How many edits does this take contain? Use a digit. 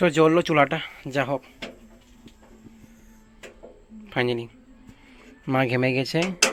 0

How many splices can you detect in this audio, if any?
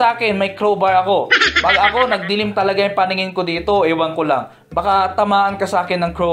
0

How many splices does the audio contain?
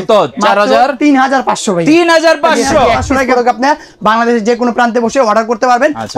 1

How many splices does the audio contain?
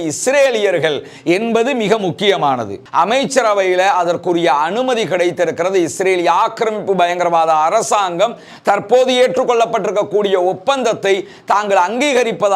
1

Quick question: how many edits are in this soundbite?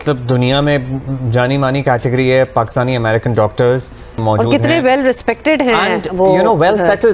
1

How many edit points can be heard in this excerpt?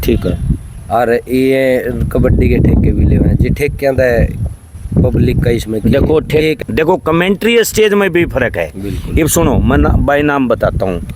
1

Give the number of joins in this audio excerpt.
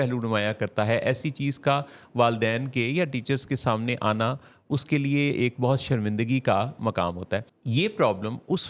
1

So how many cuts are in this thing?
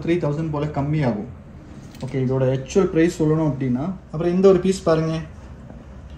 1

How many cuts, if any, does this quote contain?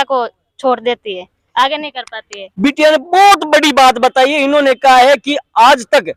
0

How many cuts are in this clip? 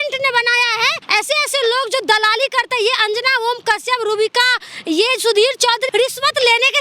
2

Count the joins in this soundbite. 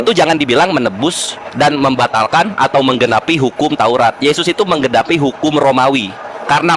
0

